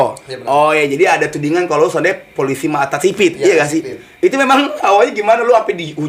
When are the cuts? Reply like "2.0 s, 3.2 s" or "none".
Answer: none